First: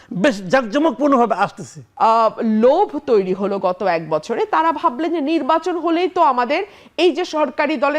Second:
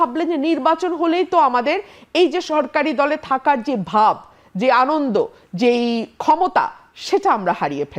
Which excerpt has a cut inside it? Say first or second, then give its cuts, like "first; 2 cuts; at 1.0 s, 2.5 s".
first; 1 cut; at 1.8 s